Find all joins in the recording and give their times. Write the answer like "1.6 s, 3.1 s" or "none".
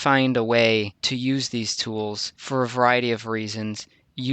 1.0 s, 2.3 s